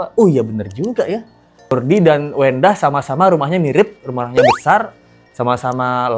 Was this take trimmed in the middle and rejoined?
yes; 1 cut; at 1.7 s

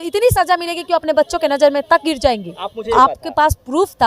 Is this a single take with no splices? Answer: no; 1 cut; at 2.9 s

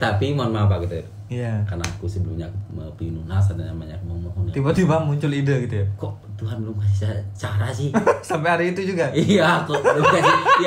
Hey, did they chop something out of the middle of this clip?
no; 0 cuts

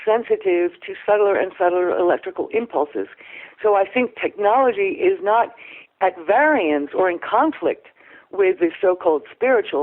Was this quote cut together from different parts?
no; 0 cuts

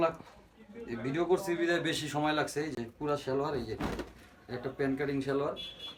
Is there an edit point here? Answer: no; 0 cuts

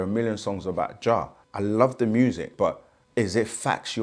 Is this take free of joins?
no; 2 cuts; at 1.4 s, 2.5 s

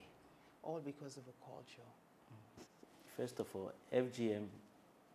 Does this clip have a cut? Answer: yes; 1 cut; at 2.8 s

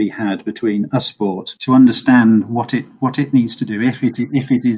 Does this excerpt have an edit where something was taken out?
no; 0 cuts

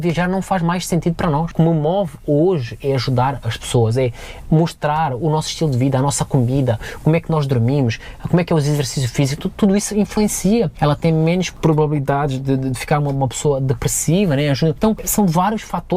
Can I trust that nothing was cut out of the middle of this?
no; 4 cuts; at 1.5 s, 10.7 s, 11.5 s, 14.9 s

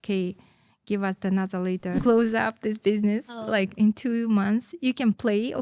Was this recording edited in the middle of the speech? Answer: yes; 1 cut; at 2.0 s

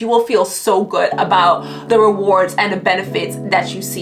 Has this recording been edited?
no; 0 cuts

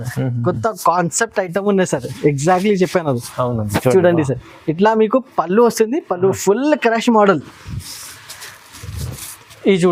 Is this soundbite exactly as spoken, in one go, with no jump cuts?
yes; 0 cuts

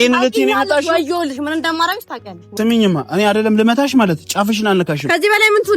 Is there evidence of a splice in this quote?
yes; 1 cut; at 2.4 s

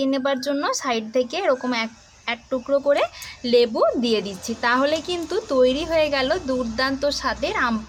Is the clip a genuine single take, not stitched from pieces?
yes; 0 cuts

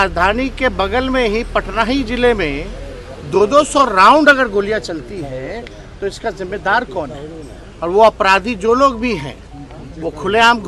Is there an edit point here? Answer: no; 0 cuts

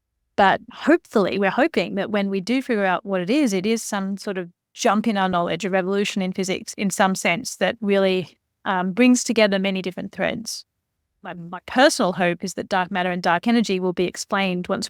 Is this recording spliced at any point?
no; 0 cuts

